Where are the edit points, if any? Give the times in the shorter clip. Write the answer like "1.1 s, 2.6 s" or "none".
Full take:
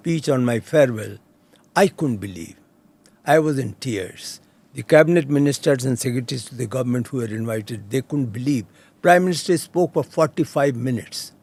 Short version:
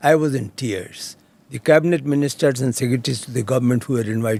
none